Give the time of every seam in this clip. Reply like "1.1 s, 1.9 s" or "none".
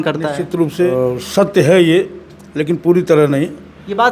0.9 s